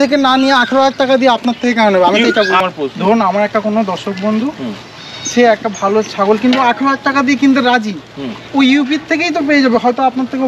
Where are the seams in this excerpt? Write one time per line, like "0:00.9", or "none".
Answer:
0:02.6